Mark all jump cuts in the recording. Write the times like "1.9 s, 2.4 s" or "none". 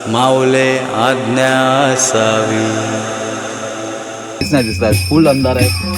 4.5 s